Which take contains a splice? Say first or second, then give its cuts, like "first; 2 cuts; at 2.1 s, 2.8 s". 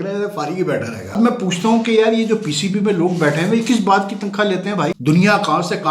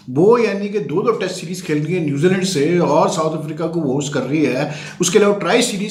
first; 2 cuts; at 1.2 s, 5.0 s